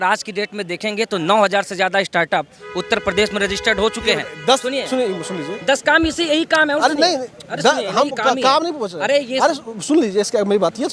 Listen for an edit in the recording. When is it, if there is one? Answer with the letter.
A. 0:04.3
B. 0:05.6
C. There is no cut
C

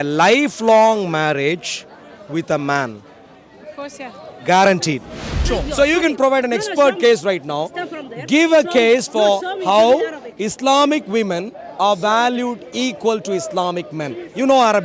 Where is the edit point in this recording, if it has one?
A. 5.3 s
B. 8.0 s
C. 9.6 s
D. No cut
A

